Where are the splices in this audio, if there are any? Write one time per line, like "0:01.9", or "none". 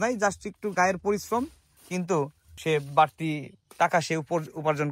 0:01.8
0:02.5